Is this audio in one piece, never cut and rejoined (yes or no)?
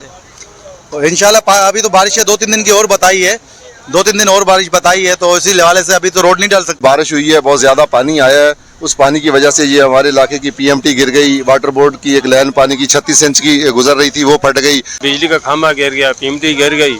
no